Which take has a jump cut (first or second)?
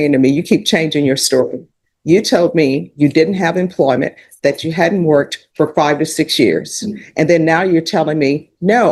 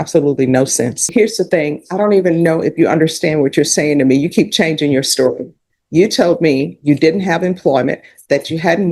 second